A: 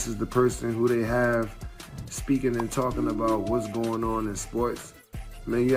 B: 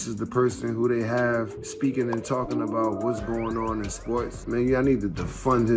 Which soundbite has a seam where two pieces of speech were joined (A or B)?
B